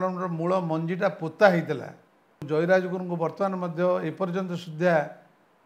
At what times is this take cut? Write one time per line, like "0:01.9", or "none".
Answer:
0:02.4